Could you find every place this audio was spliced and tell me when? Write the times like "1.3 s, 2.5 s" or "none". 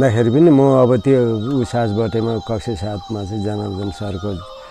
none